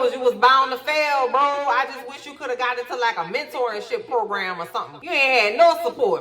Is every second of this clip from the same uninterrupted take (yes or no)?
no